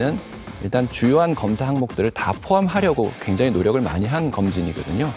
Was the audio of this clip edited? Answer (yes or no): no